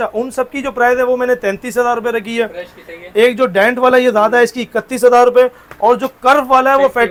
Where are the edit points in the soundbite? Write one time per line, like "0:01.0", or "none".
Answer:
none